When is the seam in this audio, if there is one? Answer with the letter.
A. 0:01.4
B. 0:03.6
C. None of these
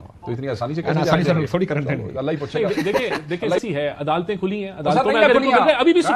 B